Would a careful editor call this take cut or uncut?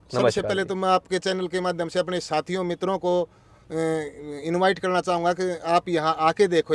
uncut